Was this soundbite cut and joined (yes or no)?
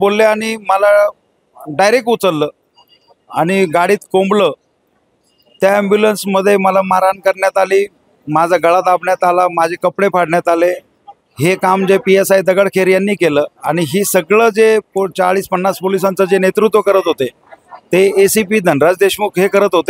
no